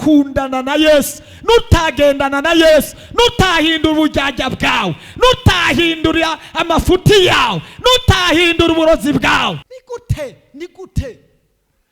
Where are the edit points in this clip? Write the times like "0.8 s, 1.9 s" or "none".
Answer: 9.7 s